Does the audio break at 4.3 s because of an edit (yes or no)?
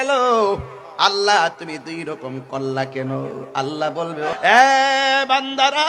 yes